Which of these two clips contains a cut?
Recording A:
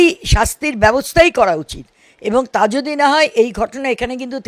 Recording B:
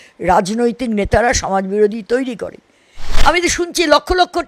B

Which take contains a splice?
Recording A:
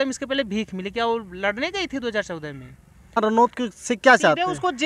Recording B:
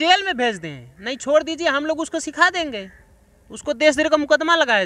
A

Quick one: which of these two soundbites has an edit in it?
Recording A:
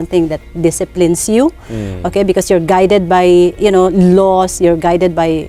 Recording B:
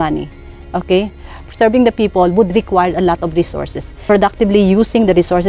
B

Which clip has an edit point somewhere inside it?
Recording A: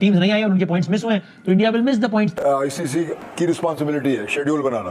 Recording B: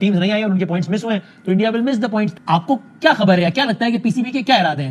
A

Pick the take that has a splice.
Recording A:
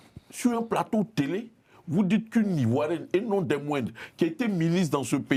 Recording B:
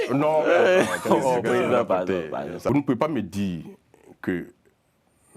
B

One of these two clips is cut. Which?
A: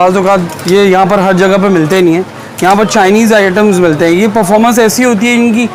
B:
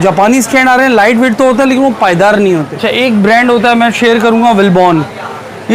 B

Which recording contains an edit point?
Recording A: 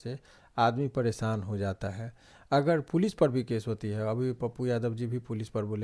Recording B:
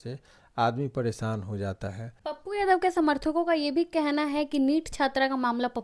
B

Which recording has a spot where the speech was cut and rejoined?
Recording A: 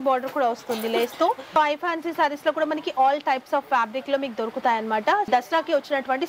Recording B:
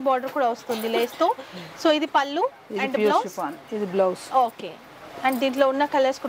A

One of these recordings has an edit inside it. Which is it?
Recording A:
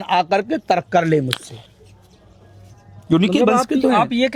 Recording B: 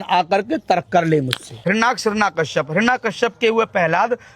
B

